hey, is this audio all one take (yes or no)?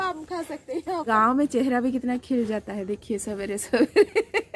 no